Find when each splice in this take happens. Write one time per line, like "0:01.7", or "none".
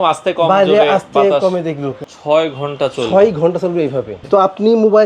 0:01.9
0:04.2